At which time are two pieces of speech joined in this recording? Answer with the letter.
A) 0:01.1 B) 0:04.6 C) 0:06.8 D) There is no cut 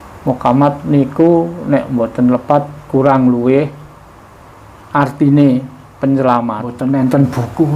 C